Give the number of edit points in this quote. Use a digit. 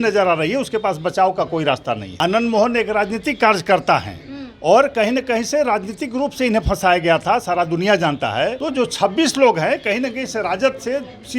2